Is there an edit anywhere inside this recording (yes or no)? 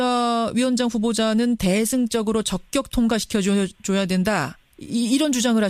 no